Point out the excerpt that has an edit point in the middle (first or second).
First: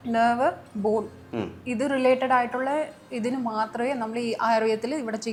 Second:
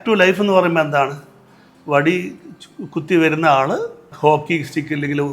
second